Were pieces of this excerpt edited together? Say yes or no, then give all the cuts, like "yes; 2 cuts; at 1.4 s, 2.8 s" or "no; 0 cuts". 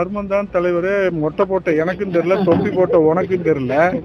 no; 0 cuts